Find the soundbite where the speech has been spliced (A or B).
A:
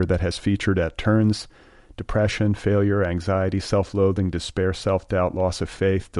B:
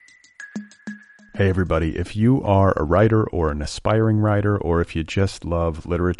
B